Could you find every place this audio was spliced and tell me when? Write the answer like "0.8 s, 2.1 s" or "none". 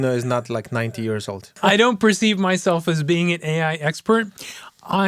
1.6 s